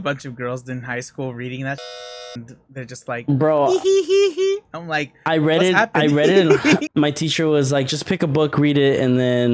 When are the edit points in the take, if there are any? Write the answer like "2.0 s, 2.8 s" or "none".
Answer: 6.9 s